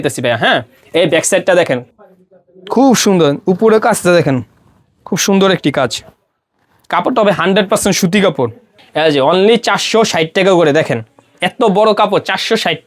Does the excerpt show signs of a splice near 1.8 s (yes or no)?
yes